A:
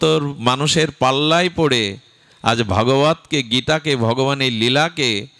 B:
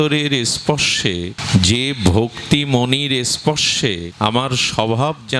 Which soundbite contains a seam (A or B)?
B